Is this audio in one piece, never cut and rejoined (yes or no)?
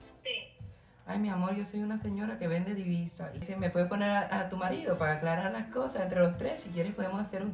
no